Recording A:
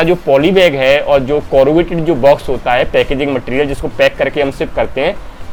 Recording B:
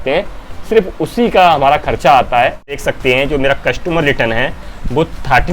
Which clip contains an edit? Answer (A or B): B